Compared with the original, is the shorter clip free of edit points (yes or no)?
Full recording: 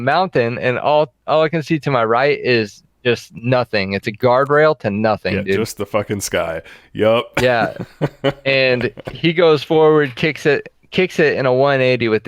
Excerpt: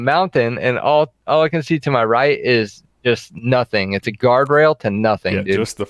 yes